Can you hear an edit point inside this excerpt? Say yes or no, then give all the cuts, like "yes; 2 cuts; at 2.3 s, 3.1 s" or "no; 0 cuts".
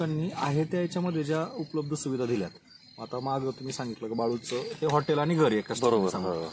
no; 0 cuts